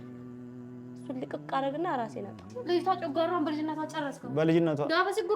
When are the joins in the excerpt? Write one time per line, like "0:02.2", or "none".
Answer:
0:02.4